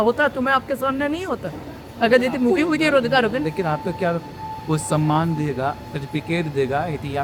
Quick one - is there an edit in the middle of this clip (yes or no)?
no